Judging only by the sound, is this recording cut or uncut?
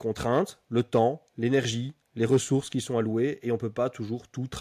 uncut